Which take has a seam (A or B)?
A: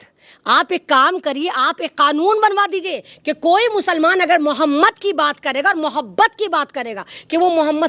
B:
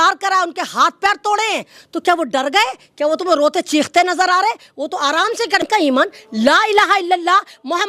B